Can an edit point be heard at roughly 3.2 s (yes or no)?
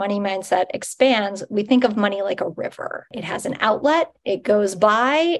yes